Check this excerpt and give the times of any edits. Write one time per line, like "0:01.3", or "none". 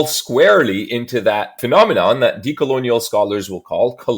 0:01.6